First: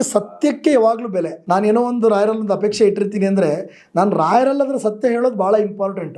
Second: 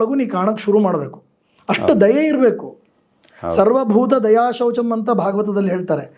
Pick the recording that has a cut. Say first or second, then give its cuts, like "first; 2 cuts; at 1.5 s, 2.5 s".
first; 1 cut; at 1.3 s